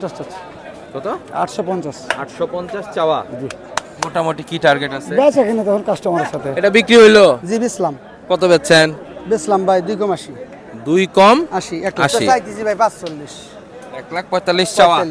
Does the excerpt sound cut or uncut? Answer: cut